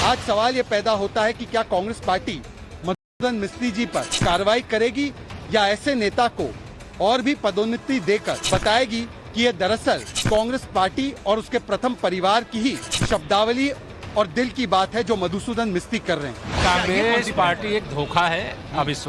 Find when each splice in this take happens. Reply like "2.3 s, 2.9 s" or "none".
4.1 s, 8.3 s, 10.1 s, 12.9 s, 16.4 s

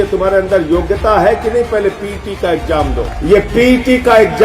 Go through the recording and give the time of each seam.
3.1 s

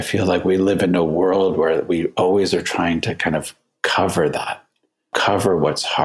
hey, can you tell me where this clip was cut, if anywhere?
5.1 s

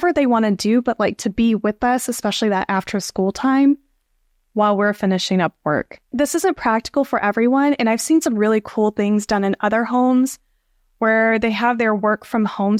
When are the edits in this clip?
none

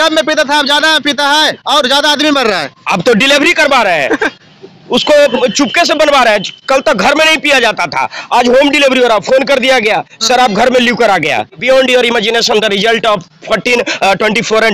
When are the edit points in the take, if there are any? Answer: 11.6 s

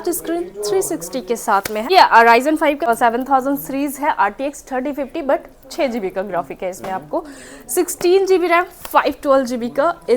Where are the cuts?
1.9 s, 2.9 s

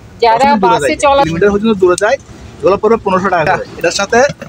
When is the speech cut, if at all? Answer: 1.3 s, 3.5 s

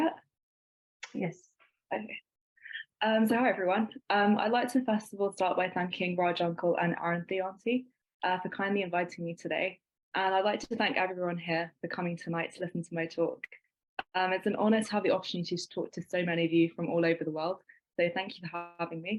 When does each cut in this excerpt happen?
none

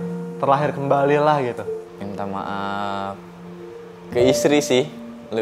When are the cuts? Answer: 1.7 s

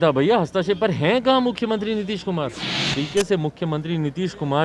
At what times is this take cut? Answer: 3.0 s

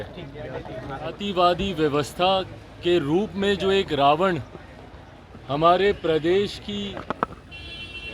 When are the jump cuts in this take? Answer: 1.2 s

